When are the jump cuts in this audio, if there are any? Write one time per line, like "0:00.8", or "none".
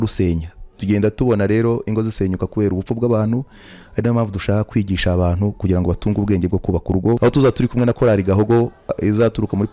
0:07.2
0:09.0